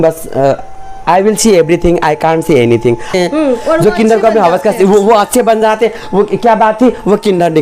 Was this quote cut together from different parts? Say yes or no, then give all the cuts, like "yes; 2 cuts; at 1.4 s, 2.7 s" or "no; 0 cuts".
yes; 1 cut; at 3.2 s